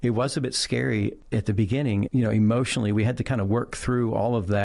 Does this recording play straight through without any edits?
no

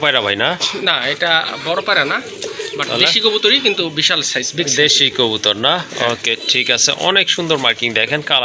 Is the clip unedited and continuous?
yes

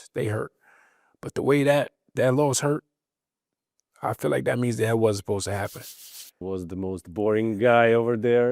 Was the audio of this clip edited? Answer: yes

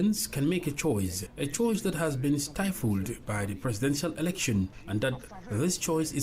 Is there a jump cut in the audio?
yes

